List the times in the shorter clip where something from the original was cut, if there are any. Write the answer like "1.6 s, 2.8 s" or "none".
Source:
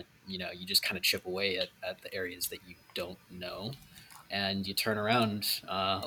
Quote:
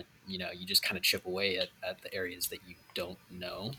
none